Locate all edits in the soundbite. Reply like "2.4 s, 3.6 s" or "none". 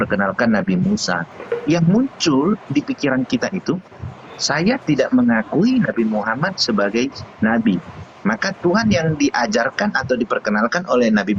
1.3 s